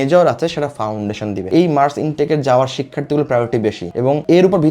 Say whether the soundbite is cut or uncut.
cut